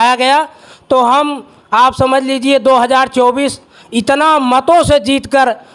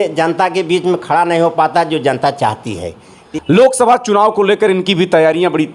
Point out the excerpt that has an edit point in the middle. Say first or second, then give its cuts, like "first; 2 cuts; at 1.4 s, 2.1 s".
second; 1 cut; at 3.2 s